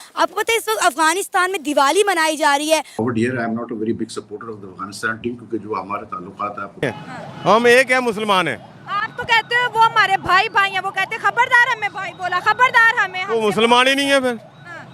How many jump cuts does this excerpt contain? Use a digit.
2